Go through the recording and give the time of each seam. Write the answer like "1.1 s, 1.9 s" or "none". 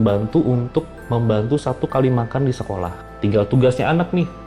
3.0 s